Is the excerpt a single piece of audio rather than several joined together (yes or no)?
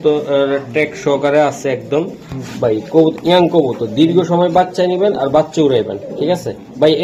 yes